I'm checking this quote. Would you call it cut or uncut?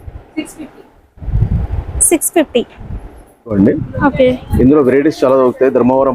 cut